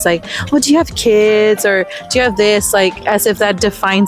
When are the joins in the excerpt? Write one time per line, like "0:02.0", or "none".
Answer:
none

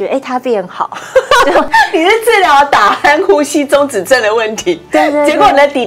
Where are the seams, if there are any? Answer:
0:01.7

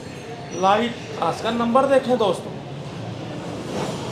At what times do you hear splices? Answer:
none

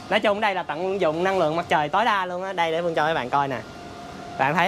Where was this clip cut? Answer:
none

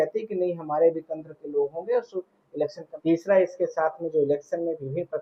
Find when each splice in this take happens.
0:02.9

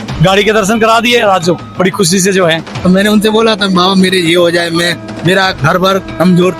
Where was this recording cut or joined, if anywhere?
0:02.7

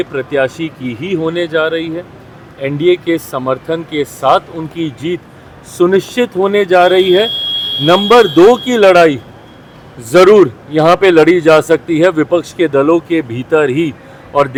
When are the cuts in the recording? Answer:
none

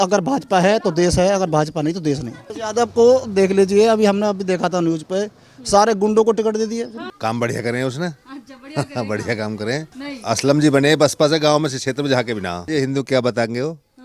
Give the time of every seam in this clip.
0:02.6
0:07.0
0:09.9
0:12.6

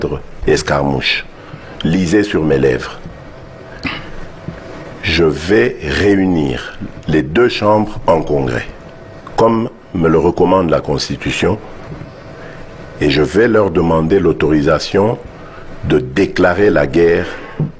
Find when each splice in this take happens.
none

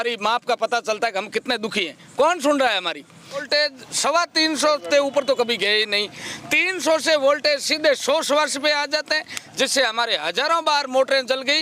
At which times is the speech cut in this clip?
0:03.5

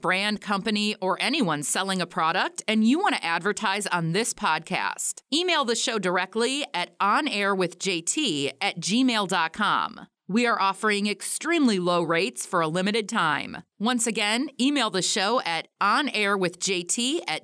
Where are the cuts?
none

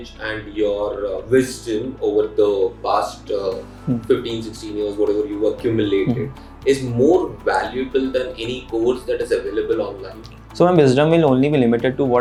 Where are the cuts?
none

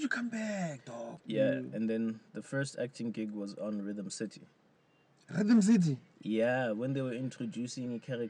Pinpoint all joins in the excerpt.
0:01.2

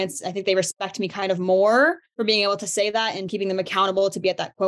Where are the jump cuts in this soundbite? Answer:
0:02.1
0:03.3

